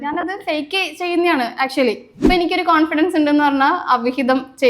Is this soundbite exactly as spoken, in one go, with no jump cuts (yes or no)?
no